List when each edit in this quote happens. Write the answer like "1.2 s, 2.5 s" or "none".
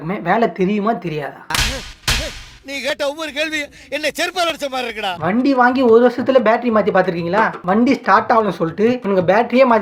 none